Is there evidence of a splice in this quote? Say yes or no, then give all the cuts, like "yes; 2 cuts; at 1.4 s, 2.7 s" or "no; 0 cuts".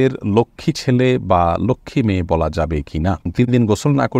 yes; 1 cut; at 3.3 s